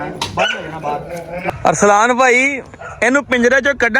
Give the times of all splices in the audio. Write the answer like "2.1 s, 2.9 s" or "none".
1.5 s